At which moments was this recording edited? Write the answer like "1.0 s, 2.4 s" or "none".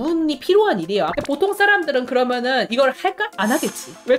1.1 s